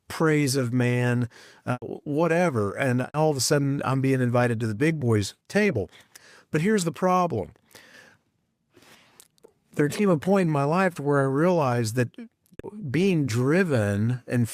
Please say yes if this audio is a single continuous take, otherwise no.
no